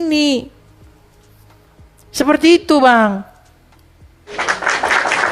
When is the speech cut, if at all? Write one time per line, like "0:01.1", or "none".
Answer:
none